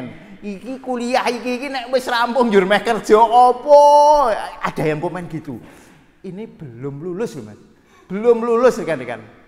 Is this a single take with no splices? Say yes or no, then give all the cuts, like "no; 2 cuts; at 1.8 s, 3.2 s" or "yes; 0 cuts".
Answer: yes; 0 cuts